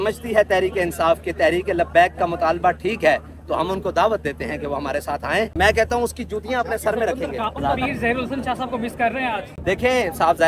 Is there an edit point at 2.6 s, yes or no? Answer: no